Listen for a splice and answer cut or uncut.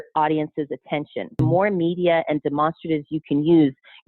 cut